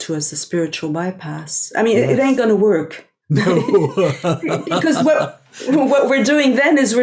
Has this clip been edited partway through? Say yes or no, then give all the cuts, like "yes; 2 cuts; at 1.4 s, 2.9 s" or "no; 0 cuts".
yes; 1 cut; at 2.4 s